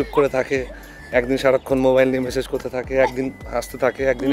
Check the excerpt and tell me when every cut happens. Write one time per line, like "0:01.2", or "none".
none